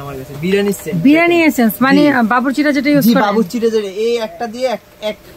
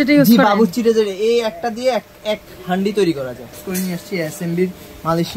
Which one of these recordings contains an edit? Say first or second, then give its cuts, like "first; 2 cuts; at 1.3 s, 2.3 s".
second; 1 cut; at 3.5 s